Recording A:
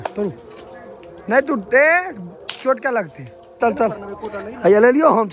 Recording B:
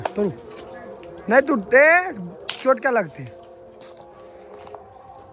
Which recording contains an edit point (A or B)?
A